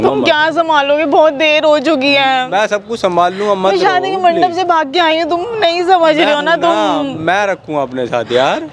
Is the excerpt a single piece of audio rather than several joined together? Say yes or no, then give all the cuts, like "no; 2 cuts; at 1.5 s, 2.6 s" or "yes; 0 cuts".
yes; 0 cuts